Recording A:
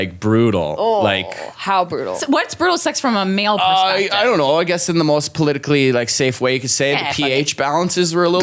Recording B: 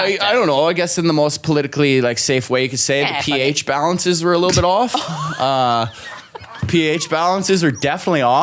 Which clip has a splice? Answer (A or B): A